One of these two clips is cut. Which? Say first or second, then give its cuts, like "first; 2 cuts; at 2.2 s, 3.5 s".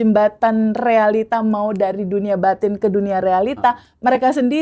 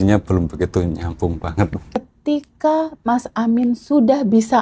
second; 1 cut; at 2.0 s